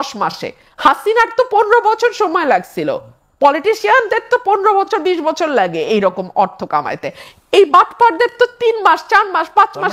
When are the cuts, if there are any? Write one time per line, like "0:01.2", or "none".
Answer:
none

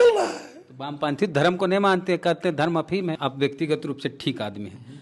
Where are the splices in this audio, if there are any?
0:03.2

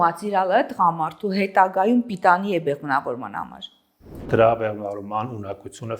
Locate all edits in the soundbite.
0:04.2

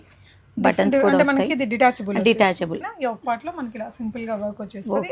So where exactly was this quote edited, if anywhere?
0:02.8

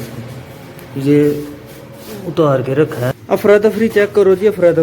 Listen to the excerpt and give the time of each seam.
0:03.1

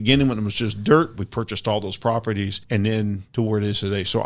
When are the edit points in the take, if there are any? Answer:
0:02.6
0:03.2

